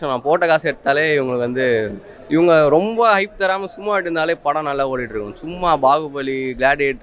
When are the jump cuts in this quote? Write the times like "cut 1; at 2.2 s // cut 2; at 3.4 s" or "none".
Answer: none